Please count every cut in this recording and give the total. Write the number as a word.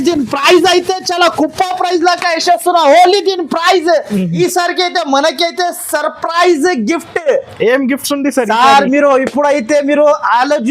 one